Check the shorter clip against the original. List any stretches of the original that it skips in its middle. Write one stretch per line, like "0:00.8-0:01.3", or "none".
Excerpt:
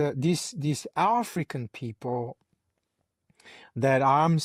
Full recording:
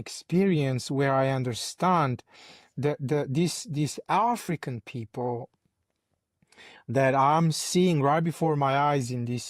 none

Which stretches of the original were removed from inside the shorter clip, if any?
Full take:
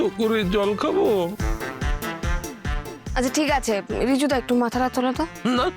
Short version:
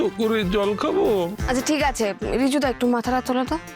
0:01.4-0:03.1

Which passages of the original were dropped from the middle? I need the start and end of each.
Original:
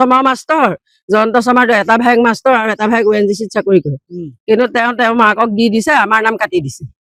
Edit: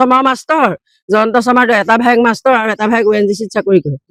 none

